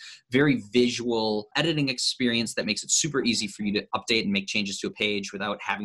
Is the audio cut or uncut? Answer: cut